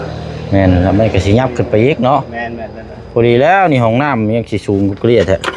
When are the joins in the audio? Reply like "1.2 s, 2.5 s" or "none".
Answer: none